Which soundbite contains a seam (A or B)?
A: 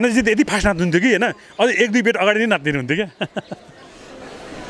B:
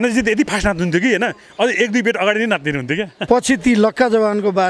B